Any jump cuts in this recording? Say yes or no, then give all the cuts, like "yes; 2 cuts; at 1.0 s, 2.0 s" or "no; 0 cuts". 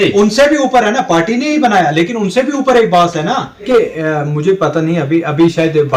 yes; 1 cut; at 3.7 s